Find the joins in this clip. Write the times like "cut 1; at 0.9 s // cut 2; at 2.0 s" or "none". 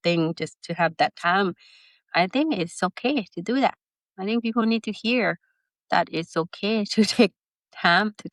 none